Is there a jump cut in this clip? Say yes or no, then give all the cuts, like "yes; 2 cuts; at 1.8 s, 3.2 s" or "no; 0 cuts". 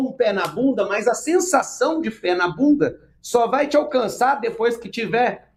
no; 0 cuts